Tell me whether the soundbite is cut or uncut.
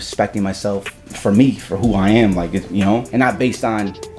cut